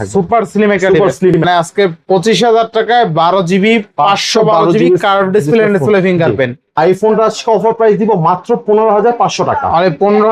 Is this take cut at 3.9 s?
no; 2 cuts; at 1.4 s, 6.6 s

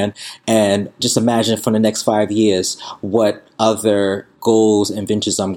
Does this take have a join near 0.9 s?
yes; 2 cuts; at 0.9 s, 4.3 s

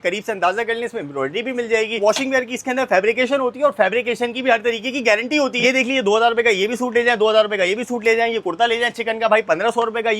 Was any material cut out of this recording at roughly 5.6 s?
yes; 2 cuts; at 2.0 s, 5.6 s

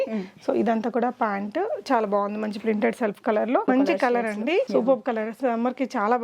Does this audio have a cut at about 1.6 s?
no; 2 cuts; at 3.6 s, 4.7 s

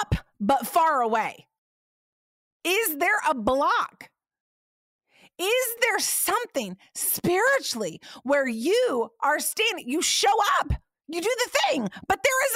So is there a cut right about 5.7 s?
yes; 1 cut; at 5.7 s

